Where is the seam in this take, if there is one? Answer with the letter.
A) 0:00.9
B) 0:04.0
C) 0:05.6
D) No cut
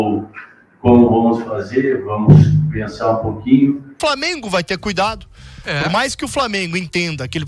B